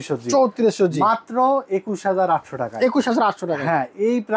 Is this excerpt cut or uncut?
uncut